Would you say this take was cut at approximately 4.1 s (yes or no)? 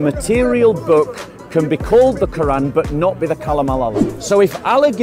yes